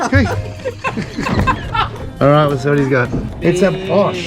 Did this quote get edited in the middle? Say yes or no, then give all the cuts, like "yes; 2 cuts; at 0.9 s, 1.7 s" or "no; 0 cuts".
yes; 2 cuts; at 1.9 s, 3.2 s